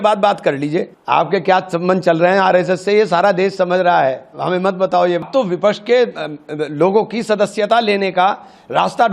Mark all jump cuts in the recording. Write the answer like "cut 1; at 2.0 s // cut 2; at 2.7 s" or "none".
cut 1; at 1.0 s // cut 2; at 5.2 s